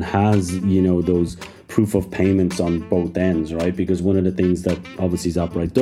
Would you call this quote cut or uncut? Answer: uncut